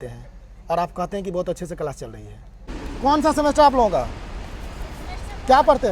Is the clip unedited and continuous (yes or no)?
no